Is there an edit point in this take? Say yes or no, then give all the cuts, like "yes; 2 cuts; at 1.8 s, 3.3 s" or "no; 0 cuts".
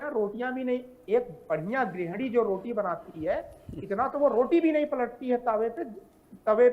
no; 0 cuts